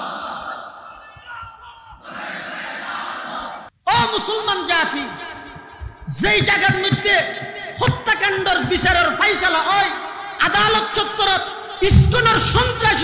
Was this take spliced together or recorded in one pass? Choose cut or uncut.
cut